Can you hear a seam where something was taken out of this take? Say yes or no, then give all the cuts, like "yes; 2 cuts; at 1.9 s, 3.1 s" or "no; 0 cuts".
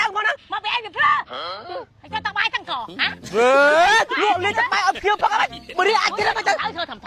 no; 0 cuts